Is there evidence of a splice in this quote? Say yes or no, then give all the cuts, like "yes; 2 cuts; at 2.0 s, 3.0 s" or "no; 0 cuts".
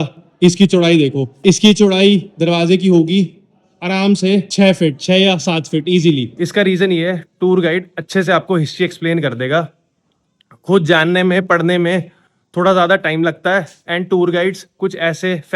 yes; 3 cuts; at 1.3 s, 4.5 s, 6.3 s